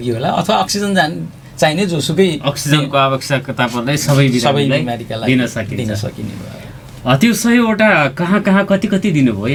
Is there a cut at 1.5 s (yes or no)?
no